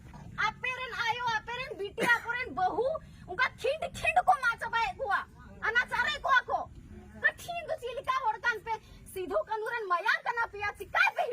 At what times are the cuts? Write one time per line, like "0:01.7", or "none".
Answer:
none